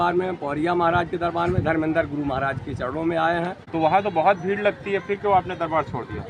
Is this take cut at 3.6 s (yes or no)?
yes